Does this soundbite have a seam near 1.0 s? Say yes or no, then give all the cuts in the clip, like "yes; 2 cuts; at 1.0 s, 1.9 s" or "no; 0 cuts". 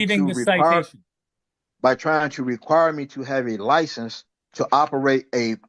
no; 0 cuts